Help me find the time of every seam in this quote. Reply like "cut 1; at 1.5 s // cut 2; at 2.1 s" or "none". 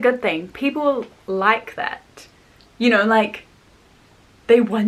none